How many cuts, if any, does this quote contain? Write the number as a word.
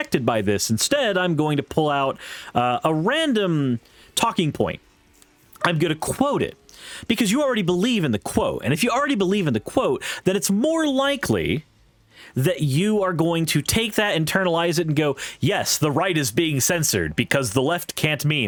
zero